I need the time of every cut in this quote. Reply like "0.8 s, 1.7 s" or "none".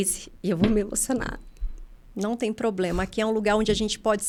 none